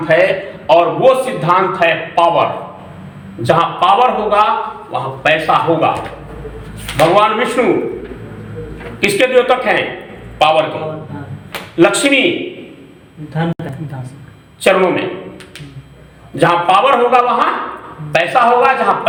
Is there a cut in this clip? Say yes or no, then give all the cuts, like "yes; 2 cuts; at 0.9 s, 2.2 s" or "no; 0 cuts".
no; 0 cuts